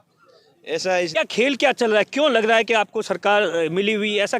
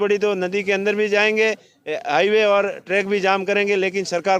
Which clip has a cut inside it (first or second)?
first